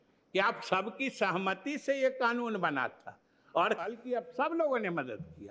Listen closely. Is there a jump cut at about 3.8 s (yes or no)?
yes